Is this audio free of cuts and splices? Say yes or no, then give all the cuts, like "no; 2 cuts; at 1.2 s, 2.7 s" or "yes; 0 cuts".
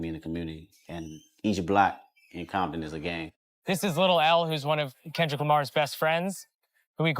no; 1 cut; at 3.2 s